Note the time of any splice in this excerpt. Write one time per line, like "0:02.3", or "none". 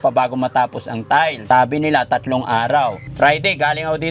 0:01.4
0:03.0